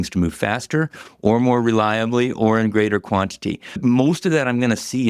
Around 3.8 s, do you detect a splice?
yes; 1 cut; at 3.8 s

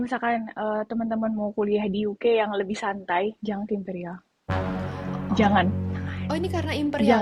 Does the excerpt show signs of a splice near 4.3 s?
no; 0 cuts

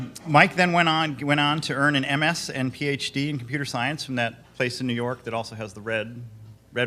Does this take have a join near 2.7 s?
no; 1 cut; at 5.8 s

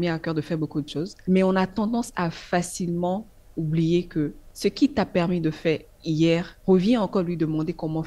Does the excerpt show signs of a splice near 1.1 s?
yes; 3 cuts; at 1.1 s, 4.4 s, 6.5 s

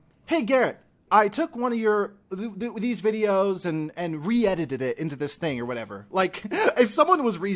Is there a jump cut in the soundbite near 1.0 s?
yes; 1 cut; at 1.0 s

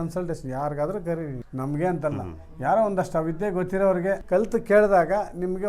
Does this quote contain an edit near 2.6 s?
no; 2 cuts; at 1.4 s, 4.2 s

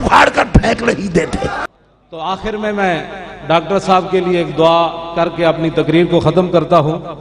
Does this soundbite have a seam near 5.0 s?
no; 1 cut; at 1.6 s

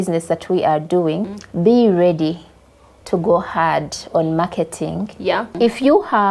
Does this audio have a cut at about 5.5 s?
yes; 2 cuts; at 1.3 s, 5.5 s

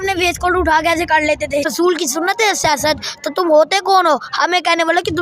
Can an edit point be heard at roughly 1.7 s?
yes; 1 cut; at 1.7 s

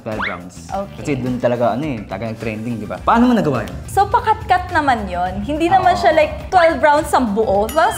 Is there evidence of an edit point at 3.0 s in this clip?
yes; 2 cuts; at 3.0 s, 3.8 s

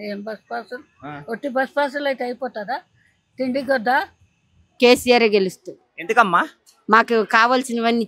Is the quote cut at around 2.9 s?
no; 1 cut; at 4.6 s

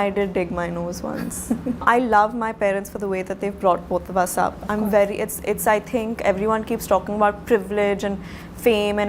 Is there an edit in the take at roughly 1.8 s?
yes; 1 cut; at 1.8 s

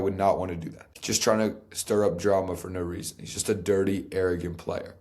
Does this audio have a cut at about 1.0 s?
yes; 1 cut; at 1.0 s

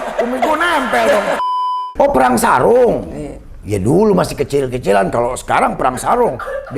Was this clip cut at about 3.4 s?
no; 1 cut; at 1.5 s

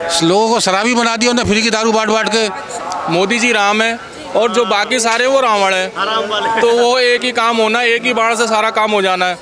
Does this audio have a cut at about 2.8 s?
yes; 1 cut; at 2.8 s

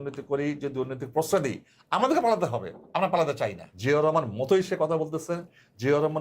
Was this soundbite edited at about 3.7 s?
yes; 1 cut; at 3.7 s

